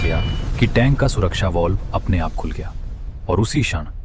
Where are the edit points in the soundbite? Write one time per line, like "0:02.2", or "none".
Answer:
none